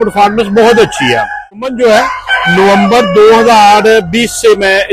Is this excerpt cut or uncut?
cut